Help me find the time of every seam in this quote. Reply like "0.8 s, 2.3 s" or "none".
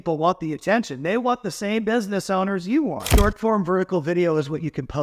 3.1 s